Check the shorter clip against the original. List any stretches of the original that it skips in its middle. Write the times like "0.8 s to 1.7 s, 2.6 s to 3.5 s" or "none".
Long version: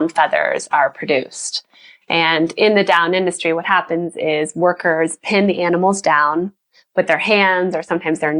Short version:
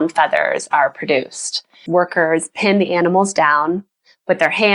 1.8 s to 4.5 s